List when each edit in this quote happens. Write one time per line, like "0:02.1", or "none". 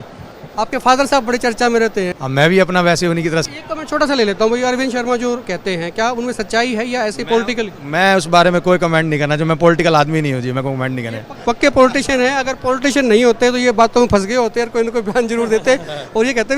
0:02.1
0:03.5